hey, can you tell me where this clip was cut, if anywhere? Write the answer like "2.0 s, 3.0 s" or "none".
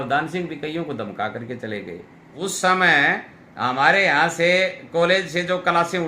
2.2 s